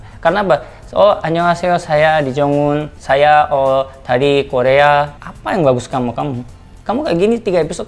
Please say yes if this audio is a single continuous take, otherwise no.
no